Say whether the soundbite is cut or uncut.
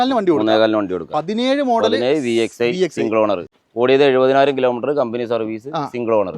cut